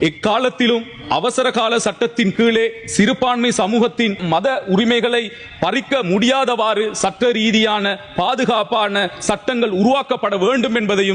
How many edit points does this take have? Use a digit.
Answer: 0